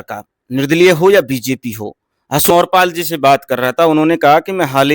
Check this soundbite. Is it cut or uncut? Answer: cut